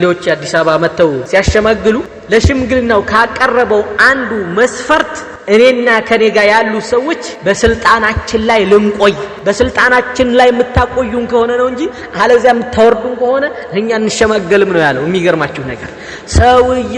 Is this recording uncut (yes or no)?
no